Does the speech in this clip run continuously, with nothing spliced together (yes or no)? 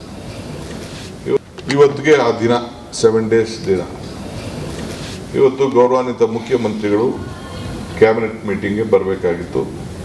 no